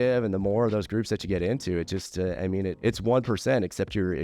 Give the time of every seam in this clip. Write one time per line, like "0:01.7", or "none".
0:02.8